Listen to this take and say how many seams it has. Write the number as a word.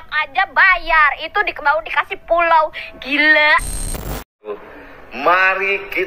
one